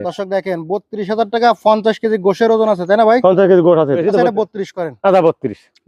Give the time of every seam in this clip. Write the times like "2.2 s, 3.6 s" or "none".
4.0 s